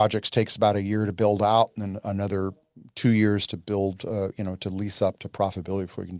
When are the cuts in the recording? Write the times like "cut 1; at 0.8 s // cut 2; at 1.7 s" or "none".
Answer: none